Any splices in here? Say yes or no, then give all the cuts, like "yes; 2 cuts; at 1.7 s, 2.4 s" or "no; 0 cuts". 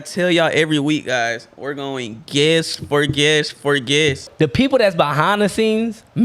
yes; 1 cut; at 4.3 s